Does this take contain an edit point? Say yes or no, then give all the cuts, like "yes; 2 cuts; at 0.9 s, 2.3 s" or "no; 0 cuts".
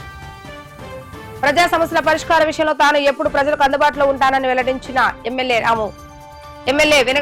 no; 0 cuts